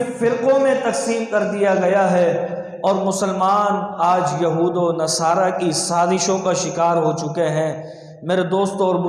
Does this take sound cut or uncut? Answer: uncut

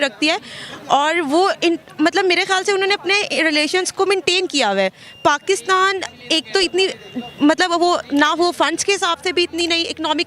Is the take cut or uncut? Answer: uncut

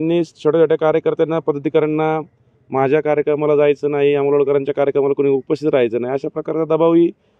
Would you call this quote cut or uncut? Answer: uncut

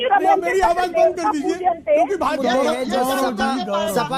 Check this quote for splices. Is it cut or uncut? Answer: cut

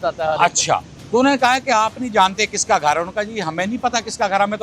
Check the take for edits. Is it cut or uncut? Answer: cut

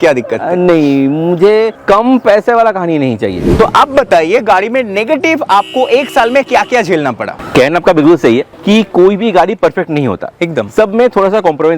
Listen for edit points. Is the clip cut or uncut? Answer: cut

